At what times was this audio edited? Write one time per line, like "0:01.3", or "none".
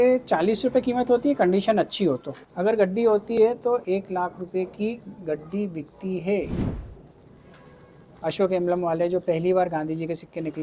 0:02.5
0:06.6